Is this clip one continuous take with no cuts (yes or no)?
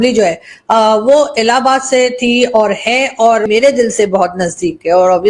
no